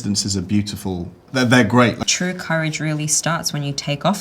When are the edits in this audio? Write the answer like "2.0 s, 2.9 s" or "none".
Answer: 2.0 s